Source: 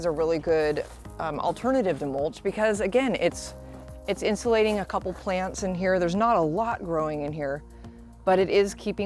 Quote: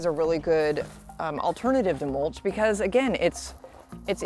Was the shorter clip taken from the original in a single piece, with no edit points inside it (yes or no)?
yes